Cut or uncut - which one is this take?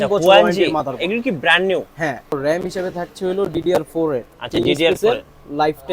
cut